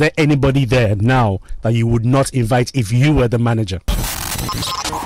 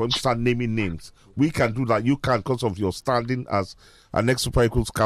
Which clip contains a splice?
first; 1 cut; at 3.8 s

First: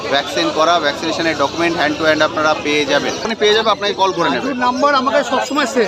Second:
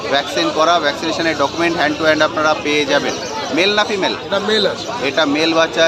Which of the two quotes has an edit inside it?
first; 1 cut; at 3.3 s

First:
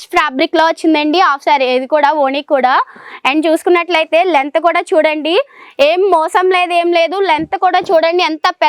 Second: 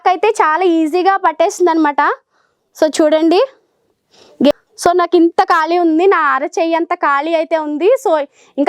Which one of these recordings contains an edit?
second; 1 cut; at 4.5 s

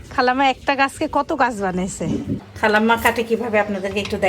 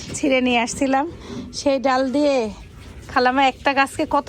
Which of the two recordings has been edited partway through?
first; 1 cut; at 2.4 s

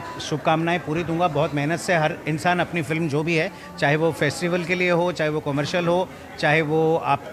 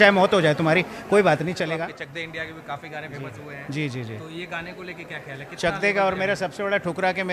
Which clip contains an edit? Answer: second; 1 cut; at 1.8 s

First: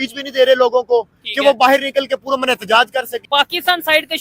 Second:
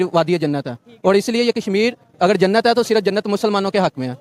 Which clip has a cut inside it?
first; 1 cut; at 3.2 s

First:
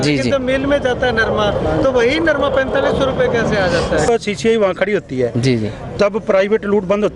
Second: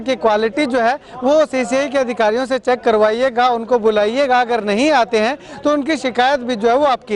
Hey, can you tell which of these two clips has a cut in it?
first; 1 cut; at 4.1 s

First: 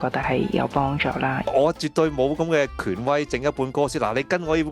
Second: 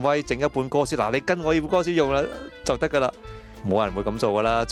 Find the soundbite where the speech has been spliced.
first; 1 cut; at 1.4 s

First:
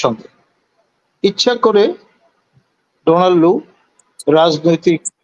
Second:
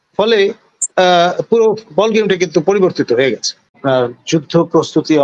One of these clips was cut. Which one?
second; 1 cut; at 3.8 s

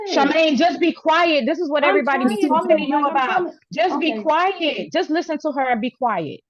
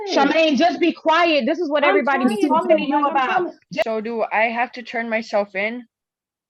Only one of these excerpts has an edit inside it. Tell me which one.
second; 1 cut; at 3.8 s

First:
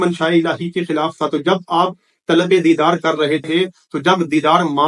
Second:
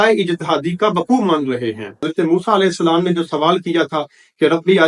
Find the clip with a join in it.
second; 1 cut; at 2.1 s

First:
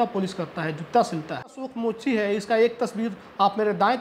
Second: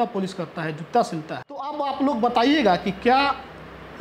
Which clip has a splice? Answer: first; 1 cut; at 1.6 s

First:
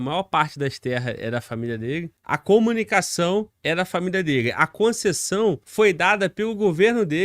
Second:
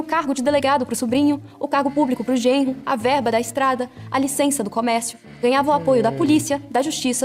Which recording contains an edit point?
first; 3 cuts; at 2.2 s, 3.5 s, 5.6 s

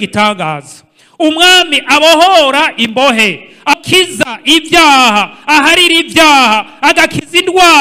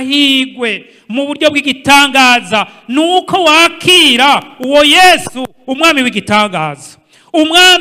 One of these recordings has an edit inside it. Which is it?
first; 1 cut; at 3.7 s

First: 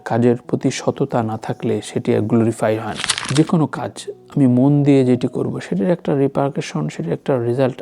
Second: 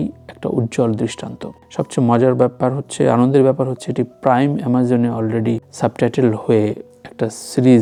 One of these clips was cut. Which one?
first; 1 cut; at 3.2 s

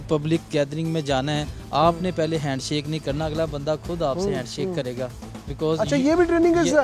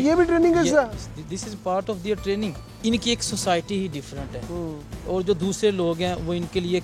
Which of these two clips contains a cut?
second; 1 cut; at 2.8 s

